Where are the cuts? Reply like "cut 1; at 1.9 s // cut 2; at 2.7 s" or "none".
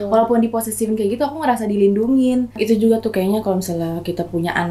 cut 1; at 2.5 s